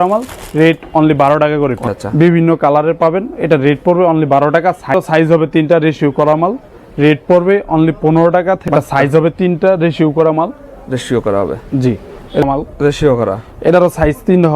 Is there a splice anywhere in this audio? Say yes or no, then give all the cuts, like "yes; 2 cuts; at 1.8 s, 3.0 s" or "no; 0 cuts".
yes; 4 cuts; at 1.9 s, 4.9 s, 8.6 s, 12.4 s